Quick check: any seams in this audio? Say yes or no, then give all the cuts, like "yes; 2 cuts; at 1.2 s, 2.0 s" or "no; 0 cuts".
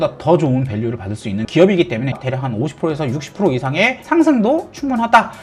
yes; 2 cuts; at 2.2 s, 4.0 s